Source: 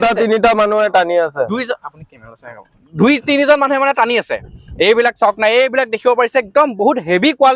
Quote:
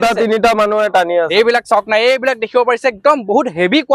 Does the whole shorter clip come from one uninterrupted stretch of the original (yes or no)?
no